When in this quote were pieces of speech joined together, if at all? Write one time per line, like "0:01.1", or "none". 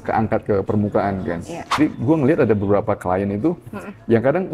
0:01.8